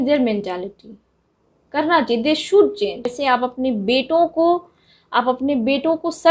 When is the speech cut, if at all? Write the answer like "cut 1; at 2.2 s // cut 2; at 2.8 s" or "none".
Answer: cut 1; at 3.1 s